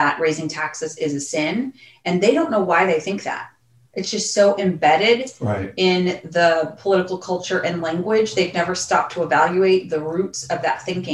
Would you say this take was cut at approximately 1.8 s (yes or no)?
no